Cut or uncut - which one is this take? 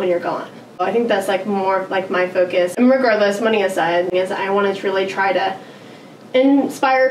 cut